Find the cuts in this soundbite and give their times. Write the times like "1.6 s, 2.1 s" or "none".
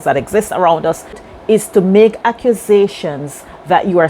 1.2 s